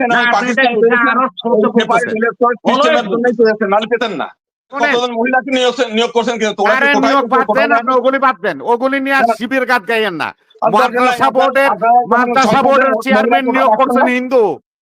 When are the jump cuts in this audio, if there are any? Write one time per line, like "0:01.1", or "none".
0:04.8